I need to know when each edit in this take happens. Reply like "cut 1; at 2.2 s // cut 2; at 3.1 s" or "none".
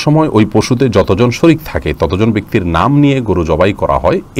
none